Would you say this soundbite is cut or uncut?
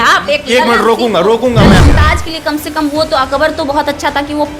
cut